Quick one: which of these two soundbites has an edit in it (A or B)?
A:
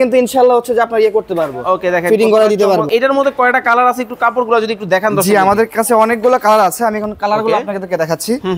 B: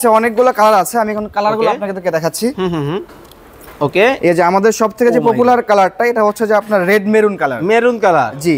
A